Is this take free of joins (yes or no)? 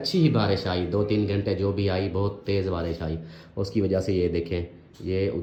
yes